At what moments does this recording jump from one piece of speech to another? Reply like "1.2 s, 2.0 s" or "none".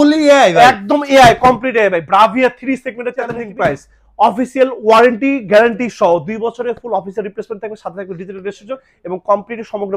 3.4 s